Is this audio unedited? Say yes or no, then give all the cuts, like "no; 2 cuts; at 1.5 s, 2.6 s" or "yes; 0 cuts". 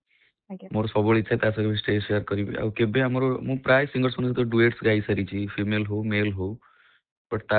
yes; 0 cuts